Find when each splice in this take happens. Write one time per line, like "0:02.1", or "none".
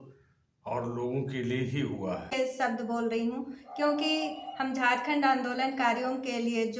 0:02.3